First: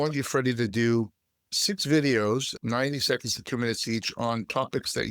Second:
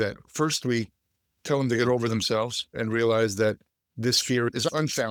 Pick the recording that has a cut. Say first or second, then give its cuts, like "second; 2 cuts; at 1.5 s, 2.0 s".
first; 1 cut; at 2.5 s